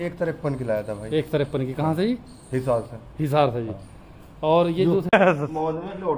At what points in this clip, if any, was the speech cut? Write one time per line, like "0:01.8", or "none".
0:05.1